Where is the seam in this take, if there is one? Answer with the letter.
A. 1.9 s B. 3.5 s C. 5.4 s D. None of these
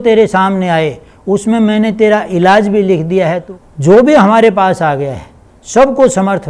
B